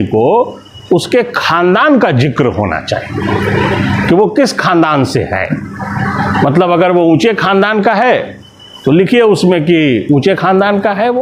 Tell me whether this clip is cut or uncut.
uncut